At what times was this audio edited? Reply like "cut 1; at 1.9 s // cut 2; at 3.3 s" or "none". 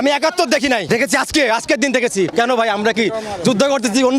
cut 1; at 0.8 s // cut 2; at 2.3 s